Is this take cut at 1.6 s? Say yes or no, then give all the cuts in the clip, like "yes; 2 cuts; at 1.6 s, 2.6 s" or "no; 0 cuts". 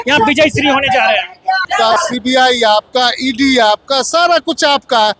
yes; 1 cut; at 1.6 s